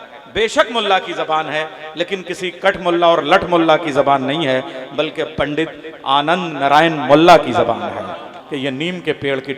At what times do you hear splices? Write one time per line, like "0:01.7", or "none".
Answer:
0:08.4